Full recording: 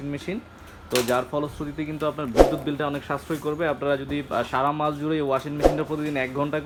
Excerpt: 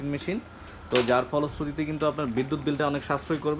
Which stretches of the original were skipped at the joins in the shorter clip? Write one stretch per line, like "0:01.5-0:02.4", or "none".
none